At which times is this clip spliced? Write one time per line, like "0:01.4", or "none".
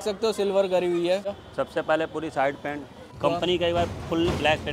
0:01.4
0:03.1